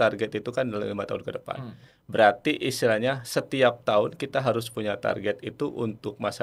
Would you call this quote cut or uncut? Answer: uncut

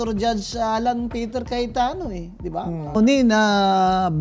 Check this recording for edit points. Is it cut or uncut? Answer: cut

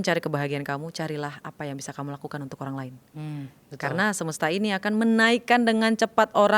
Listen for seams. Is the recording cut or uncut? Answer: uncut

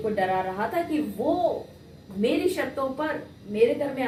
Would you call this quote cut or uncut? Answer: uncut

